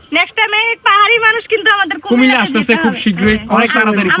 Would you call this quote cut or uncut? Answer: uncut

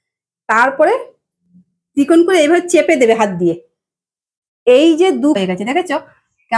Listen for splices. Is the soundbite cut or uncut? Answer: cut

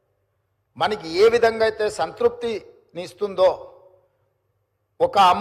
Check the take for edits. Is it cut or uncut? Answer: uncut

